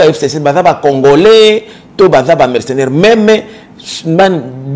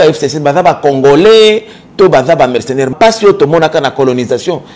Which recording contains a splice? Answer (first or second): second